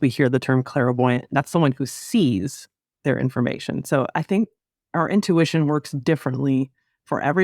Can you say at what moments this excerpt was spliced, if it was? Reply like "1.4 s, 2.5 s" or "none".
4.6 s